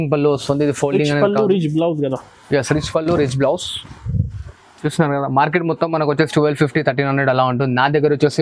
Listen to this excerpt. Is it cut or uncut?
uncut